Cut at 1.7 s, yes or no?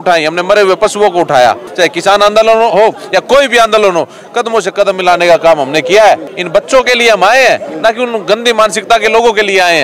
yes